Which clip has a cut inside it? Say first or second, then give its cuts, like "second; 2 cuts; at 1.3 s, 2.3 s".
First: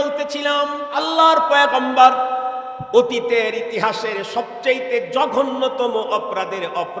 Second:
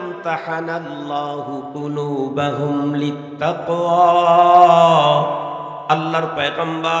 first; 1 cut; at 1.0 s